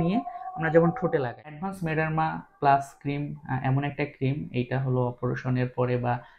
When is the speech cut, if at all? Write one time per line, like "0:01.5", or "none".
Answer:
0:01.7